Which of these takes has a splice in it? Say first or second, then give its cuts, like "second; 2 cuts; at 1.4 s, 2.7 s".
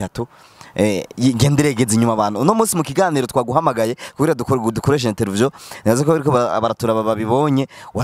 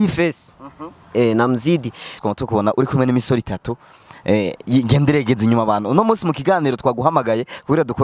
second; 1 cut; at 2.2 s